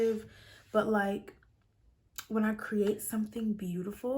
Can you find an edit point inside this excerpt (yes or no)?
no